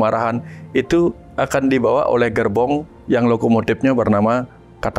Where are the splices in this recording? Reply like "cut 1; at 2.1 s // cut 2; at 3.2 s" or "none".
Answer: none